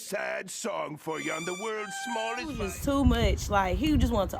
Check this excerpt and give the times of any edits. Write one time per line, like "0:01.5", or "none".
0:02.7